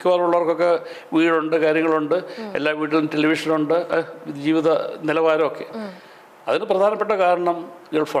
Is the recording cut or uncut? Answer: uncut